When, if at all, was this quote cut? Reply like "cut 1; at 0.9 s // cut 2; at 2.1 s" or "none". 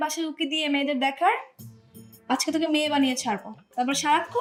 none